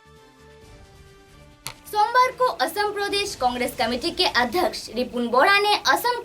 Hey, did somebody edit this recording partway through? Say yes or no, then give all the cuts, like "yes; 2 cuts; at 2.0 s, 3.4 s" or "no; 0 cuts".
yes; 1 cut; at 1.6 s